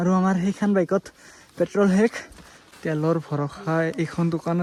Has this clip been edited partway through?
no; 0 cuts

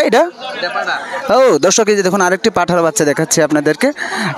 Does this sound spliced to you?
no; 0 cuts

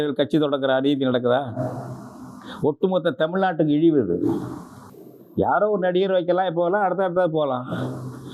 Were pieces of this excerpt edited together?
no; 0 cuts

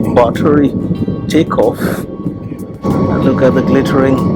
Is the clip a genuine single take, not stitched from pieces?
yes; 0 cuts

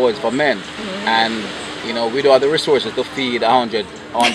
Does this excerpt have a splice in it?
no; 0 cuts

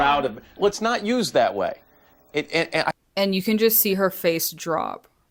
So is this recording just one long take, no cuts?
yes; 0 cuts

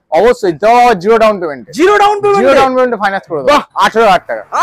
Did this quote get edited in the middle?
yes; 1 cut; at 3.7 s

